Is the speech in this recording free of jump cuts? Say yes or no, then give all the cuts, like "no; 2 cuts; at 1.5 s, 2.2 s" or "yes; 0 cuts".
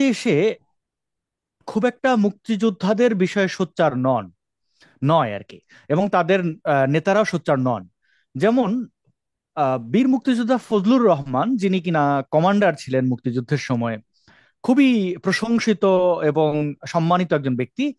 yes; 0 cuts